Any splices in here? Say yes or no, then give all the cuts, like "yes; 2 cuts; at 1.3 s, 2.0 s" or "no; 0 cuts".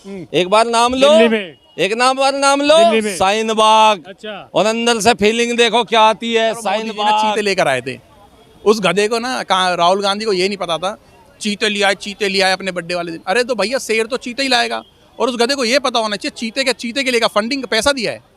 yes; 1 cut; at 7.3 s